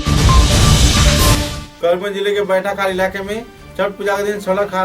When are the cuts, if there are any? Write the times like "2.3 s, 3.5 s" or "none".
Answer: none